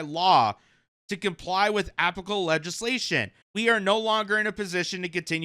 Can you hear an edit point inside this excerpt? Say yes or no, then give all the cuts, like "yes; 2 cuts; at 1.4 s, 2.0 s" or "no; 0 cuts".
yes; 1 cut; at 3.4 s